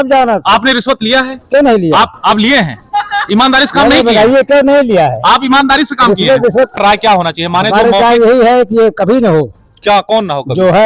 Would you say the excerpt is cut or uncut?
cut